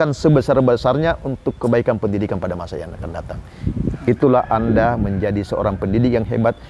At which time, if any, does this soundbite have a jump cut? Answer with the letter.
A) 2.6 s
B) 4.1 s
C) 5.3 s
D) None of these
D